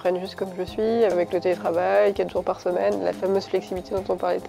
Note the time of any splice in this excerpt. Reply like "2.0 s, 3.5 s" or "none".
1.1 s